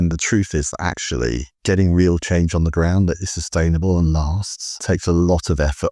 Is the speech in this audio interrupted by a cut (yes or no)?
no